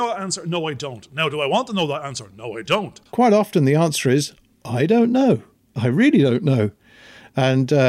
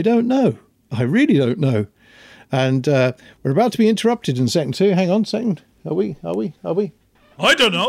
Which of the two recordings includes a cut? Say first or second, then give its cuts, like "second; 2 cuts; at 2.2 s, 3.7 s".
first; 1 cut; at 3.0 s